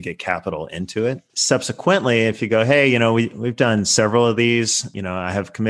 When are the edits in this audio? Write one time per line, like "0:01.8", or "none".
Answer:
0:01.3